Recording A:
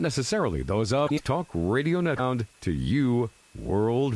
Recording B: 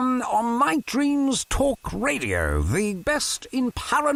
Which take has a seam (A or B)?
A